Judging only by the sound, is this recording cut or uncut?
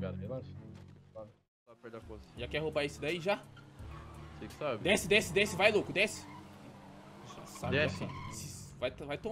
cut